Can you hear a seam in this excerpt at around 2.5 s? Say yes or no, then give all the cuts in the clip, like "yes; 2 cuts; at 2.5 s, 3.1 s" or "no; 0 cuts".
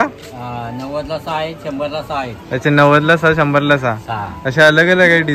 no; 0 cuts